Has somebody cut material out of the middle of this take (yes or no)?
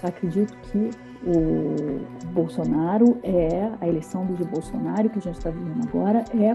yes